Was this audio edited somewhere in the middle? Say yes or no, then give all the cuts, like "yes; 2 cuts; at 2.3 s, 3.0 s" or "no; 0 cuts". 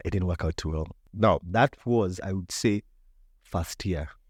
no; 0 cuts